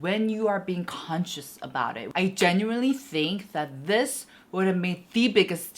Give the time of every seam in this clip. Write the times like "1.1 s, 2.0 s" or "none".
2.0 s